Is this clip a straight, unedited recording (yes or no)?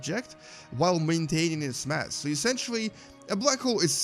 no